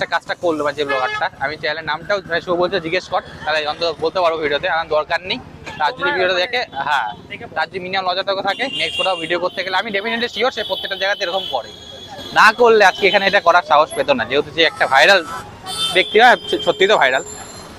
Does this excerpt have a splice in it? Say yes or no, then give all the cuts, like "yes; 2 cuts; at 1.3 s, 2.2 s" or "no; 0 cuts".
no; 0 cuts